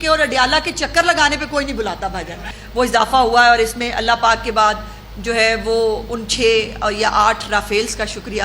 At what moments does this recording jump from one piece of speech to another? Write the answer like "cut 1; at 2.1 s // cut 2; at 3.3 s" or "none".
cut 1; at 2.5 s